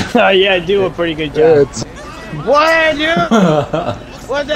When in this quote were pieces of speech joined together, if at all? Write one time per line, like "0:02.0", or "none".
0:01.7